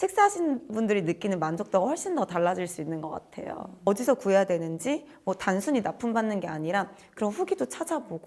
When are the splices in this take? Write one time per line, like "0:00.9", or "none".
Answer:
0:03.7